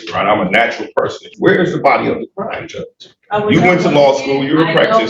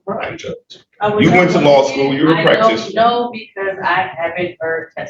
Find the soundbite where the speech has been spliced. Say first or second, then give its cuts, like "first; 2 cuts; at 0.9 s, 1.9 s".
first; 1 cut; at 1.3 s